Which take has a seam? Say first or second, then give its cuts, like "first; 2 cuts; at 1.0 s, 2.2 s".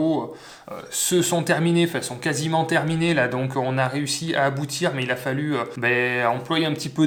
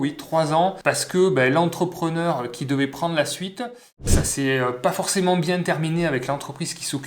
second; 1 cut; at 4.0 s